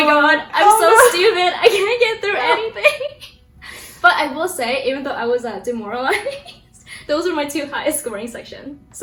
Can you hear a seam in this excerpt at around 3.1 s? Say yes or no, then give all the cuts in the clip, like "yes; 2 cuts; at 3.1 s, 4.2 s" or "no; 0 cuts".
no; 0 cuts